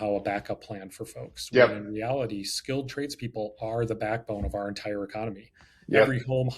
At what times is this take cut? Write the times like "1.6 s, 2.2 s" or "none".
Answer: none